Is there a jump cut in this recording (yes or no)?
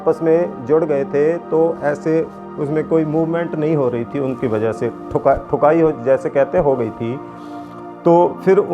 no